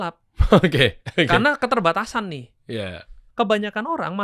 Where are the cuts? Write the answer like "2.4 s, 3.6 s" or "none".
3.2 s